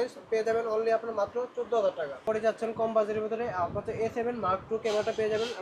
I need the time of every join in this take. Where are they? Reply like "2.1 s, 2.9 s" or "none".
2.2 s